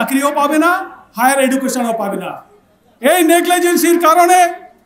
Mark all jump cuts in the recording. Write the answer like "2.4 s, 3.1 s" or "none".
2.7 s